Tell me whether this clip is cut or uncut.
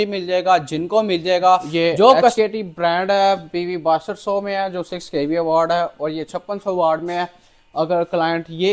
cut